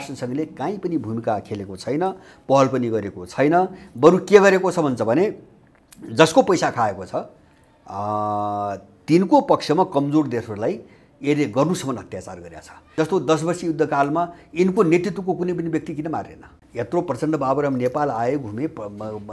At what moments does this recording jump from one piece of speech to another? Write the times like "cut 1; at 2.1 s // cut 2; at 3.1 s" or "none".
cut 1; at 12.8 s // cut 2; at 16.6 s